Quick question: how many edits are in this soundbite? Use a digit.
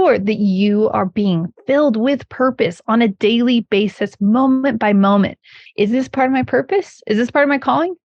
2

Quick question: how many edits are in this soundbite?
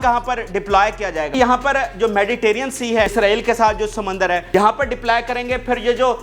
3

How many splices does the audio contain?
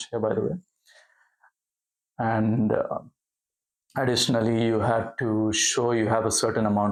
0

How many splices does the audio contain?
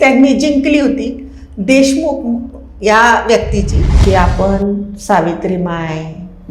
1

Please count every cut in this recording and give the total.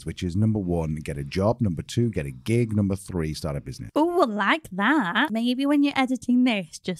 2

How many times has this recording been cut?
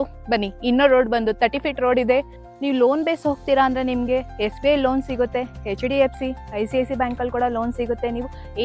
1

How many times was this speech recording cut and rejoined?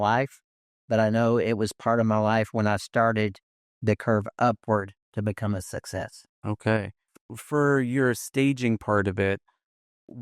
0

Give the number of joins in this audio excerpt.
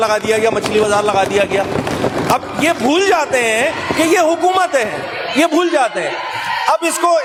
0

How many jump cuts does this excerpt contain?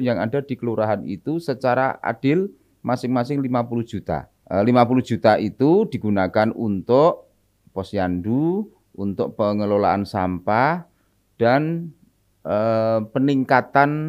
1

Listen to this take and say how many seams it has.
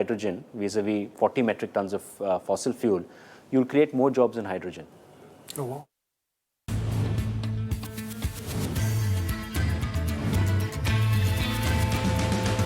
2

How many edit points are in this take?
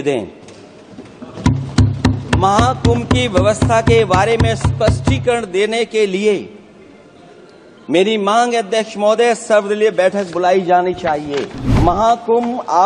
1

